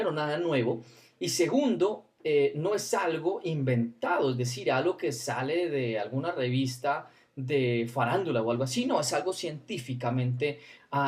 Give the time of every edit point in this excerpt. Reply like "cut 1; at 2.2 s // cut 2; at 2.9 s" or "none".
none